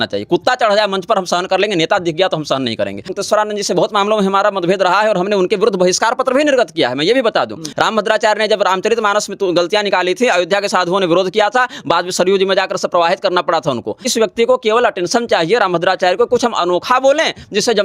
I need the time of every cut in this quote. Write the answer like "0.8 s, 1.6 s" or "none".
3.1 s, 7.6 s, 14.1 s